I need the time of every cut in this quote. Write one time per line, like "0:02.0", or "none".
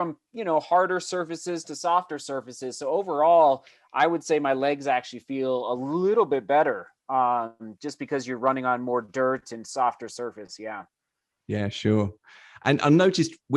none